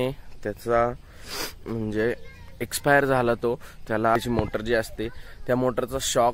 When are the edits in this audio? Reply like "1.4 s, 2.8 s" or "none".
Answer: 4.2 s